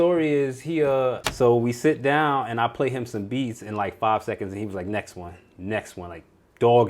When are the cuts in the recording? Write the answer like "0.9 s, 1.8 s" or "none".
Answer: 1.2 s